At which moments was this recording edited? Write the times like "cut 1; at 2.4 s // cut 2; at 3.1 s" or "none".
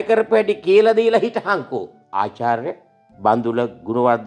cut 1; at 2.0 s